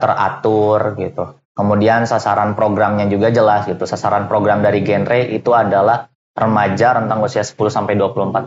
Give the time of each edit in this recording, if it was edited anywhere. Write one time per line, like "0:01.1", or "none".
none